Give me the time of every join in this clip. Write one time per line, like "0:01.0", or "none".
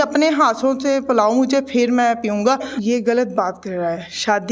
0:02.7

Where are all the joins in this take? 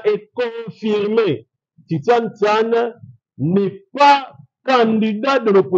none

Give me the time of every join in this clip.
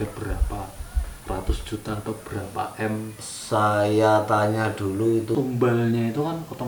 0:05.4

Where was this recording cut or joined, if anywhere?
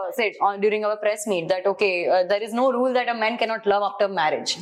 none

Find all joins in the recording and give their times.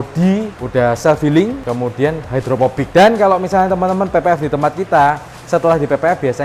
none

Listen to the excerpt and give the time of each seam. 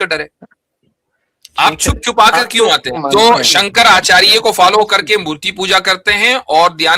0:02.9

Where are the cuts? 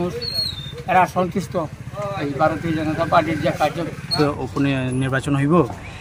0:04.1

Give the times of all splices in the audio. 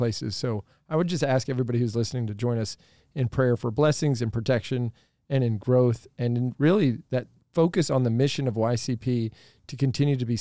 0:07.4

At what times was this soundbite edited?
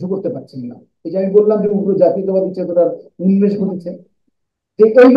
none

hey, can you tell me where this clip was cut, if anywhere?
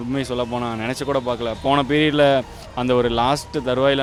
none

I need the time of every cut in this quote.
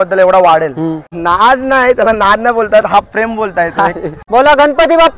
0:01.1
0:04.1

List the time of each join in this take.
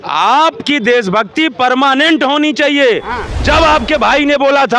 none

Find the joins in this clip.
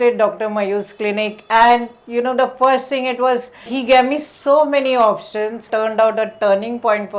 0:03.7
0:05.7

